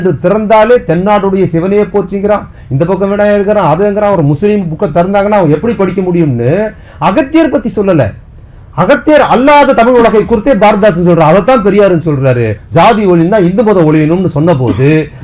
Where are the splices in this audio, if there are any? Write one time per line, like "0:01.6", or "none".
0:12.6